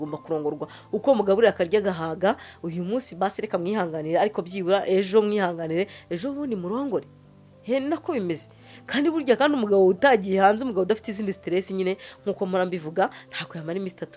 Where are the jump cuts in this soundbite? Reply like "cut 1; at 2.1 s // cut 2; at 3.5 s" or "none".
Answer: none